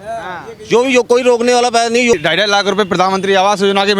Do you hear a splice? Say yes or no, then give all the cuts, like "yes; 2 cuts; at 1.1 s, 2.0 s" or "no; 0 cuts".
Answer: yes; 1 cut; at 2.1 s